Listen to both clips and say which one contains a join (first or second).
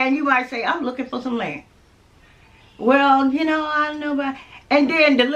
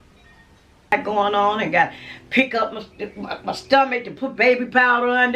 second